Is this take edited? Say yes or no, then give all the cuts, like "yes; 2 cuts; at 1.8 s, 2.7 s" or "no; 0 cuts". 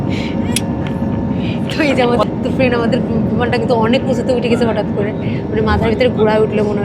no; 0 cuts